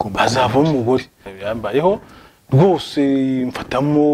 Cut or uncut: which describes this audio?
cut